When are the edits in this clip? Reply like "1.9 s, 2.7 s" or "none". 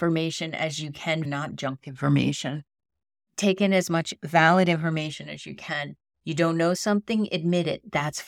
1.2 s